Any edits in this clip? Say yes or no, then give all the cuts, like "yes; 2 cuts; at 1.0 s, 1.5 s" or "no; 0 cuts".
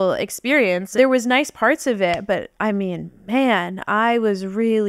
yes; 1 cut; at 1.0 s